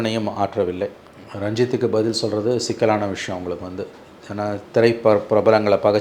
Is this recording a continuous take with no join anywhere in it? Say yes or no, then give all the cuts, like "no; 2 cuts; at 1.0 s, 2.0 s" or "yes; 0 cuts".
no; 1 cut; at 1.0 s